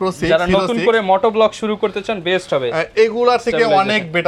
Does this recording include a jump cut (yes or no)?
no